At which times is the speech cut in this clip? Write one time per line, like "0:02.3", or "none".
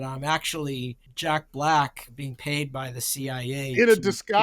0:01.0
0:02.1